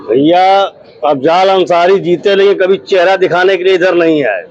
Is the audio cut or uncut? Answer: uncut